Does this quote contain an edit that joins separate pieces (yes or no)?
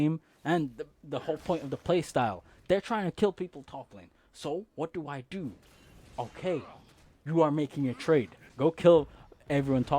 yes